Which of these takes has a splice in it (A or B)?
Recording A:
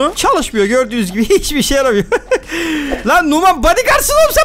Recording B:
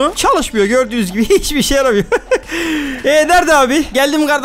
A